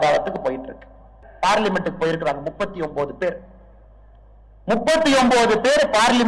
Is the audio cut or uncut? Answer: cut